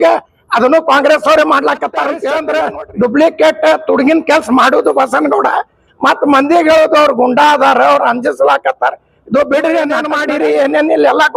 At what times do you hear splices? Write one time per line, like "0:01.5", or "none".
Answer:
0:02.3
0:10.1